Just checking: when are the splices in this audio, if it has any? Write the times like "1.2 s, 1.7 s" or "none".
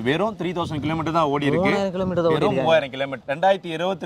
3.1 s

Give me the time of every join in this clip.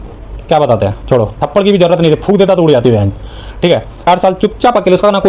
3.9 s

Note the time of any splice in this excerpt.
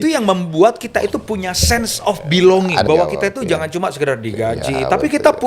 2.8 s

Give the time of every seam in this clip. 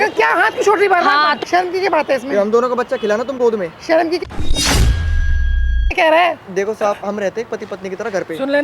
1.4 s, 4.2 s, 5.9 s

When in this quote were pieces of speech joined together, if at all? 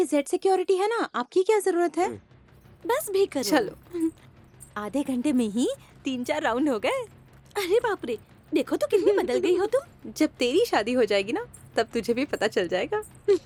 none

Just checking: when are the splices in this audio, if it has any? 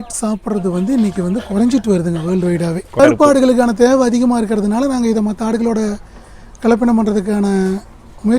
3.0 s

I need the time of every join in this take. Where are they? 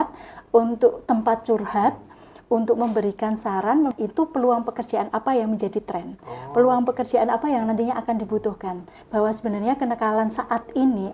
3.9 s, 8.9 s

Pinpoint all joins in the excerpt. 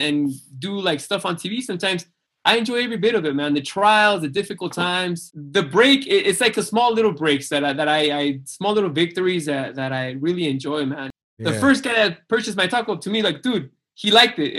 5.3 s, 11.1 s

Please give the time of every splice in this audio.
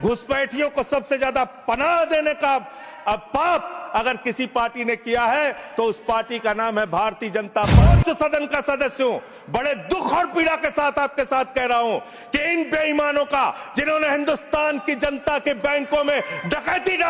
7.8 s

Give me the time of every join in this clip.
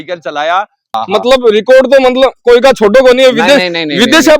0.9 s

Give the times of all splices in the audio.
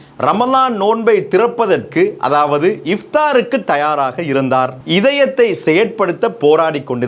4.8 s

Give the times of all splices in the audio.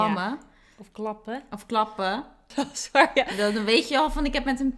2.5 s

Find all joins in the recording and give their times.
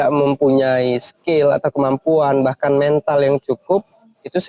none

